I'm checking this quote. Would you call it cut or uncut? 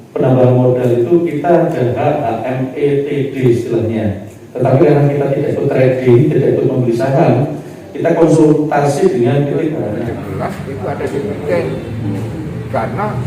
cut